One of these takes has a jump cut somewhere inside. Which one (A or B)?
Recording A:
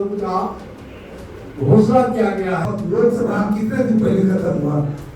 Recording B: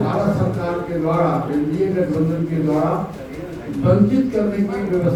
A